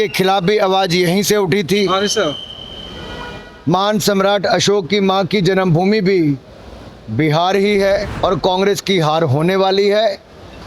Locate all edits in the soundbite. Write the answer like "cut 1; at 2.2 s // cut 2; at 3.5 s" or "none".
cut 1; at 8.1 s